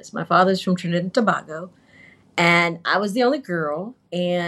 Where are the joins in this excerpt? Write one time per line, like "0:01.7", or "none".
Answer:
none